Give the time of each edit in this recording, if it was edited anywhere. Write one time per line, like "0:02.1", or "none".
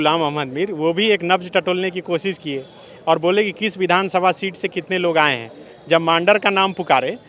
none